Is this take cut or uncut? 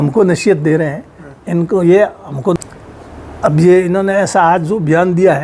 cut